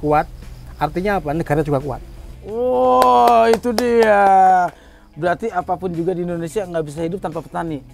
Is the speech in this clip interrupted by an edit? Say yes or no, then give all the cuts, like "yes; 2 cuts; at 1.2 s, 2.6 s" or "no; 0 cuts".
no; 0 cuts